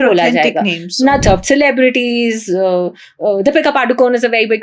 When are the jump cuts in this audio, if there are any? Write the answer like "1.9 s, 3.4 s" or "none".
1.2 s